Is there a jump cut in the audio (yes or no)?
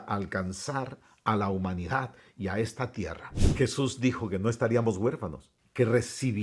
yes